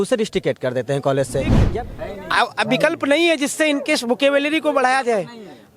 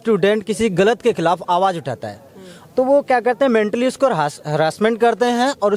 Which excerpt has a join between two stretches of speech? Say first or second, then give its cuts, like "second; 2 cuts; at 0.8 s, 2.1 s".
first; 1 cut; at 1.6 s